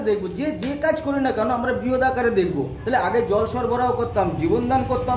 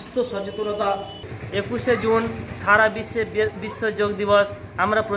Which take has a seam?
second; 1 cut; at 1.3 s

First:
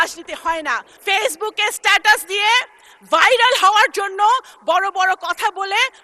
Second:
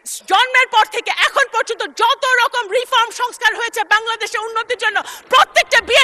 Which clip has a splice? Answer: first; 1 cut; at 0.9 s

